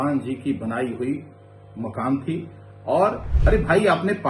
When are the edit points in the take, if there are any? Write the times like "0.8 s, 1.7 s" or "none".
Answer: 3.3 s